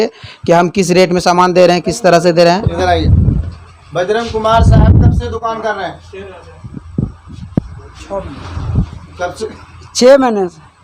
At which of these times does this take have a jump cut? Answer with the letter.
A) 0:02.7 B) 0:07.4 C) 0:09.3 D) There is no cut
A